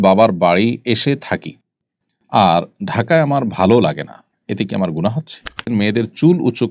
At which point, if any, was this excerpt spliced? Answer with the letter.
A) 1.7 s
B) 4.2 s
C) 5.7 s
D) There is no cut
C